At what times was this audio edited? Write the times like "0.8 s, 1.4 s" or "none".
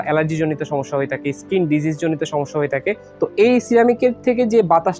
none